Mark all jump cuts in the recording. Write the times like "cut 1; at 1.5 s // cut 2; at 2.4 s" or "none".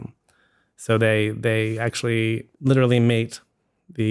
cut 1; at 2.5 s

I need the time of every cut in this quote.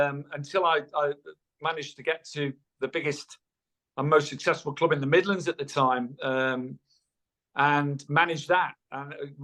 none

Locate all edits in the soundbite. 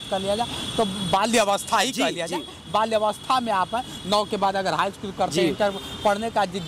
none

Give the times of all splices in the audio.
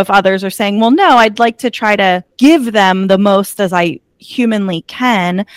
cut 1; at 2.3 s

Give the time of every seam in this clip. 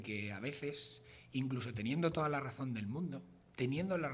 cut 1; at 2.6 s

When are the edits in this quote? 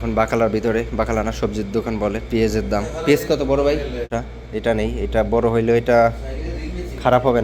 cut 1; at 4.1 s

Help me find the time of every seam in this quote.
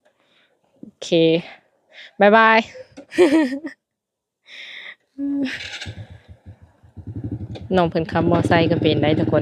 none

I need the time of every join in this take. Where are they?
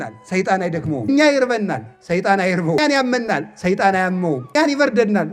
cut 1; at 1.1 s // cut 2; at 2.8 s // cut 3; at 4.6 s

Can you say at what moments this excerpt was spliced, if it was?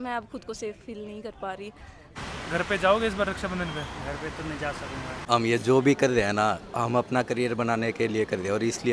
cut 1; at 2.1 s // cut 2; at 5.2 s

